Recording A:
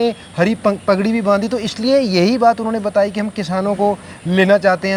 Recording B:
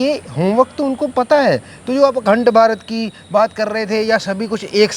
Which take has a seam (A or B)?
B